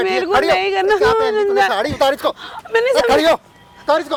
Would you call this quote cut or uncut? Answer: uncut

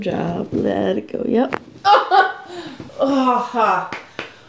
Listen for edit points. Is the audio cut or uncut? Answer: uncut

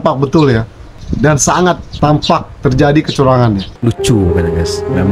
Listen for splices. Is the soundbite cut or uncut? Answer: cut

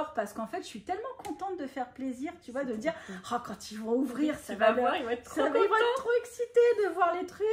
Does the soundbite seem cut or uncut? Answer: uncut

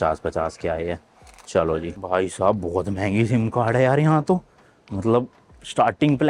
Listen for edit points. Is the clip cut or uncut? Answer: cut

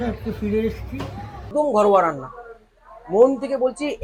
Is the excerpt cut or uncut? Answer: cut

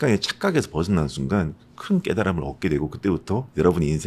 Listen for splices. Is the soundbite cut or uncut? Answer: uncut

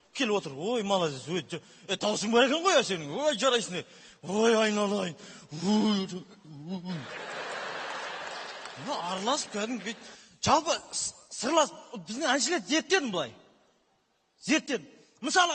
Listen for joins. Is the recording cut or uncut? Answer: uncut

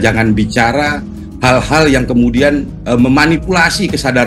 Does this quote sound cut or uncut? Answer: uncut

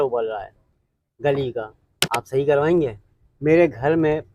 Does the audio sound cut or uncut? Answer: uncut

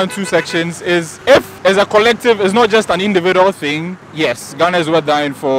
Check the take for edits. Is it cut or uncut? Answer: uncut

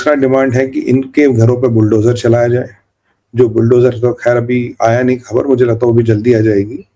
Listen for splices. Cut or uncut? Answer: uncut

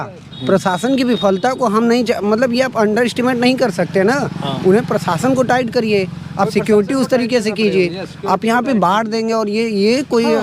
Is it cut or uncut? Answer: uncut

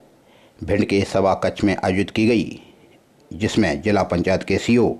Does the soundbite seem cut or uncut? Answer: uncut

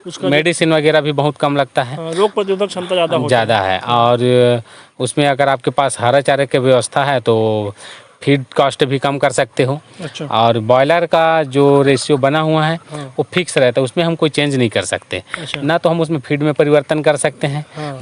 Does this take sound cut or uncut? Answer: uncut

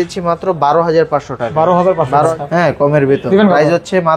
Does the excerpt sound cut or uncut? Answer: cut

